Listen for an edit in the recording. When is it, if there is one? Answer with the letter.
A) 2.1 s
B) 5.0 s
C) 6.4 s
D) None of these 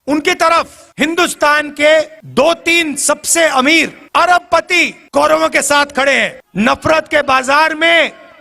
C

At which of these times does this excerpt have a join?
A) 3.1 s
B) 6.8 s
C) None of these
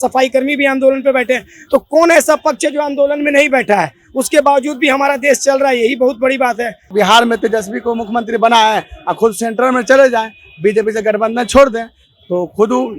B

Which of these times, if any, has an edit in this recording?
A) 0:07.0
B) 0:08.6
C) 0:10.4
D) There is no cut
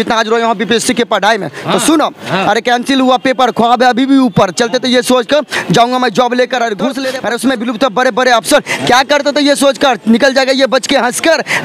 A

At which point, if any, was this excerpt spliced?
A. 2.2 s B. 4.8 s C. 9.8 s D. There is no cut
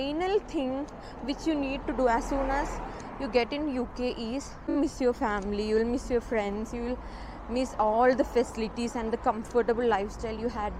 B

